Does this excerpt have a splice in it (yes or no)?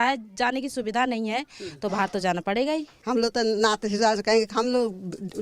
yes